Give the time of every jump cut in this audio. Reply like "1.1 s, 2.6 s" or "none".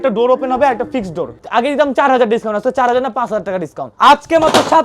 1.4 s, 3.8 s

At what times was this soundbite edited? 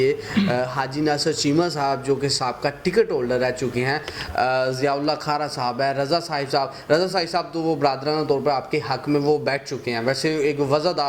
none

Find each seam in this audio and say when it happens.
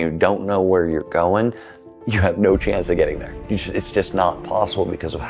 none

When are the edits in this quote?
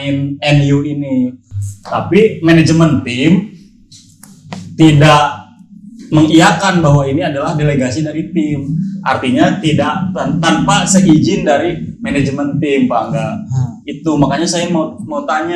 none

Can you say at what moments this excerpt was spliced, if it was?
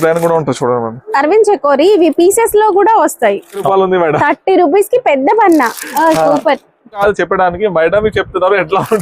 3.7 s, 7.0 s

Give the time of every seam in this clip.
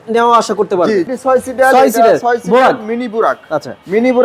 1.1 s

